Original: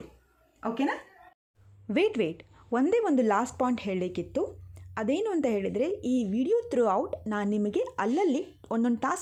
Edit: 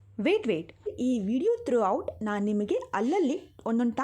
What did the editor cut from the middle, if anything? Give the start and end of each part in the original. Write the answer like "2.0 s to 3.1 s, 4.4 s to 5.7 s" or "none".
2.6 s to 6.0 s